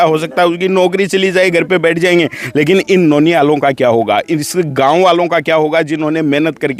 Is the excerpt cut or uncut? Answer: uncut